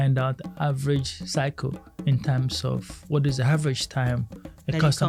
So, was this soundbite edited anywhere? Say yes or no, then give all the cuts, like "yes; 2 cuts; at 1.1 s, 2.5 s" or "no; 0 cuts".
no; 0 cuts